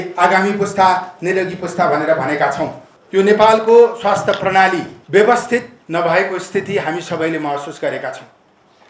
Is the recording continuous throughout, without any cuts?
no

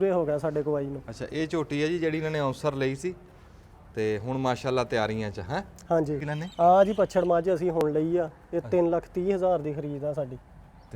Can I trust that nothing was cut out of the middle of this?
no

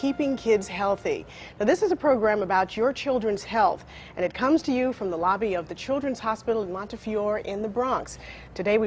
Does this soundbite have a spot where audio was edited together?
yes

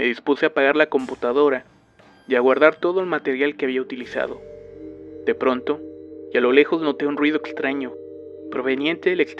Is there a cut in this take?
no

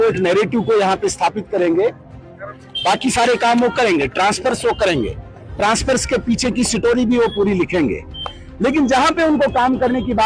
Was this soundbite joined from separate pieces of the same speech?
no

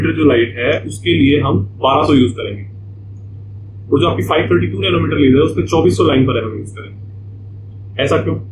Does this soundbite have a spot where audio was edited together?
no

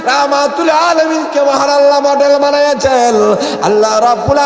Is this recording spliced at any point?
no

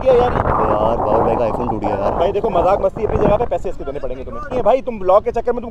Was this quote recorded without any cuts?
no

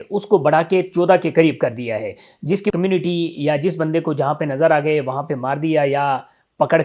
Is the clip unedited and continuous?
no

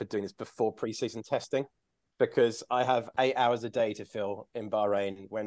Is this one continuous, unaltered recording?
yes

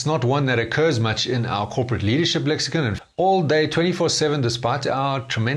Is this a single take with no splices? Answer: no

